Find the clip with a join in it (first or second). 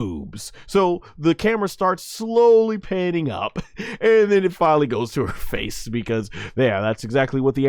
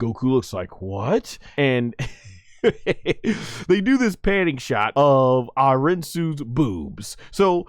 second